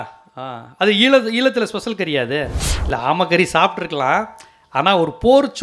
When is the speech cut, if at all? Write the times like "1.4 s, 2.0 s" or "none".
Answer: 2.7 s